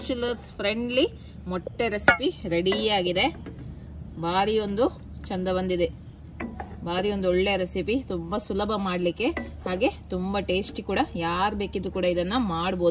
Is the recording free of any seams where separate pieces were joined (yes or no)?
yes